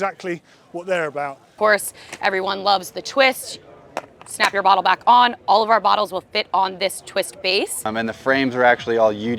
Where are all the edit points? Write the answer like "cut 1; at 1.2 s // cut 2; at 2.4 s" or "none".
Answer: cut 1; at 1.5 s // cut 2; at 7.8 s

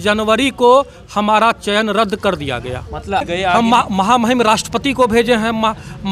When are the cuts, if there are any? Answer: cut 1; at 3.2 s

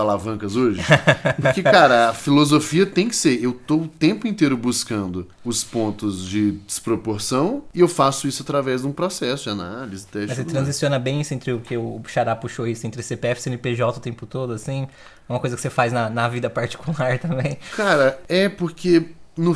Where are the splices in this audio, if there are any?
cut 1; at 5.3 s // cut 2; at 7.6 s // cut 3; at 18.2 s

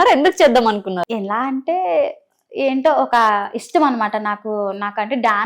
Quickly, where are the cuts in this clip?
none

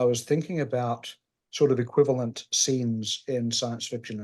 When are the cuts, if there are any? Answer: none

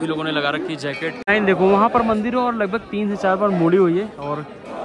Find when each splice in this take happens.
cut 1; at 1.2 s

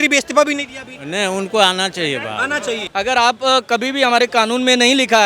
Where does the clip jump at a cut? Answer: cut 1; at 2.8 s

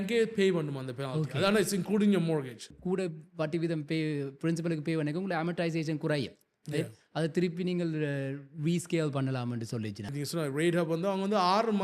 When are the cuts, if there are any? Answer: cut 1; at 2.7 s // cut 2; at 10.0 s

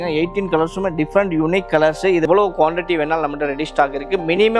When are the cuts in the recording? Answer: cut 1; at 2.2 s

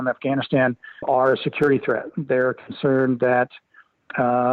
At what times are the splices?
cut 1; at 1.1 s

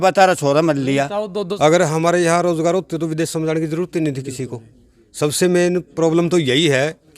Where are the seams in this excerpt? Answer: cut 1; at 1.5 s

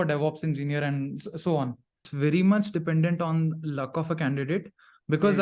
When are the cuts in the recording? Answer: cut 1; at 2.1 s

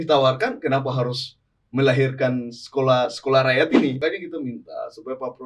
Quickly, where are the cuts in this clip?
cut 1; at 4.0 s

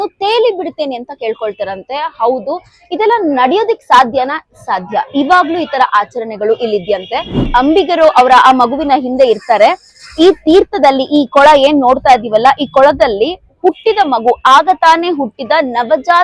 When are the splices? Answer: cut 1; at 7.4 s

